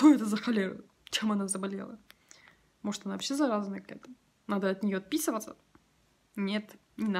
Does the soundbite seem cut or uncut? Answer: uncut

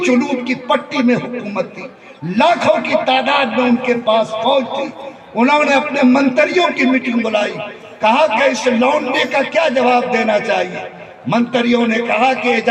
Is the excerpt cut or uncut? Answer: uncut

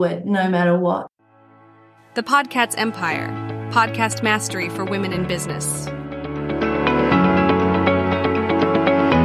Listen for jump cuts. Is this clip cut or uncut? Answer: cut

